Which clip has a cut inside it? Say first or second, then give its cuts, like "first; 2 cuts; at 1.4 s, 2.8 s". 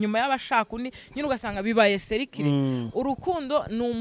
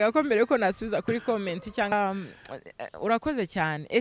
second; 1 cut; at 1.9 s